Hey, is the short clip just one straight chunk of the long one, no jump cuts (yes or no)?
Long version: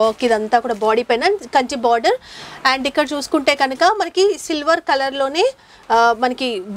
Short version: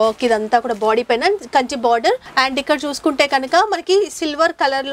no